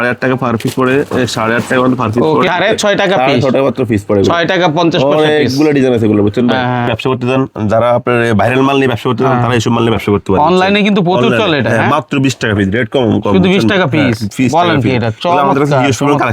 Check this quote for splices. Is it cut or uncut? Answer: cut